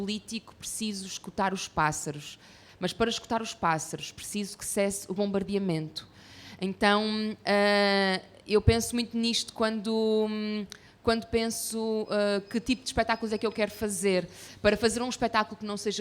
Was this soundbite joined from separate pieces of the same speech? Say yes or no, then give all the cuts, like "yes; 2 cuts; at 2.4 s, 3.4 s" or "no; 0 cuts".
no; 0 cuts